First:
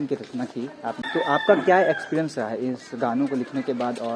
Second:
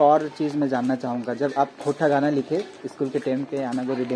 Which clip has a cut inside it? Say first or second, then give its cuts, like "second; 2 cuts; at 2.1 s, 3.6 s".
first; 1 cut; at 1.0 s